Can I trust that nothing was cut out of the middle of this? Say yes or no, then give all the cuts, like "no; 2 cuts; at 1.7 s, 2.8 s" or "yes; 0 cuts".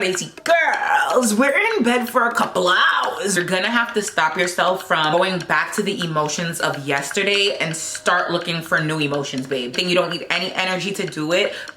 no; 3 cuts; at 3.3 s, 5.1 s, 9.7 s